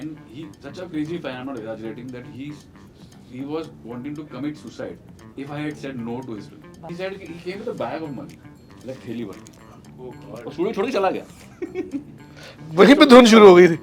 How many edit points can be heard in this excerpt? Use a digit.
1